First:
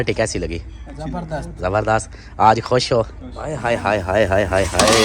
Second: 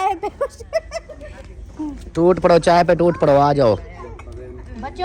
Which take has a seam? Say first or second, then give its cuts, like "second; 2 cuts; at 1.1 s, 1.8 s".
first; 1 cut; at 3.6 s